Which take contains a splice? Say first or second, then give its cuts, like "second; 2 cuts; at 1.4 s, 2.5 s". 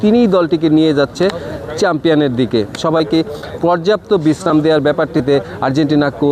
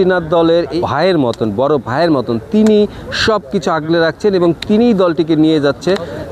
first; 1 cut; at 2.8 s